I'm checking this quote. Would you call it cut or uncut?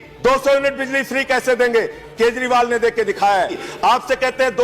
cut